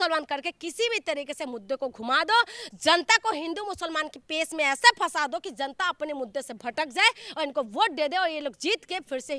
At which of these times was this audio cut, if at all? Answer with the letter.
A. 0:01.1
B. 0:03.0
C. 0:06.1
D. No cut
D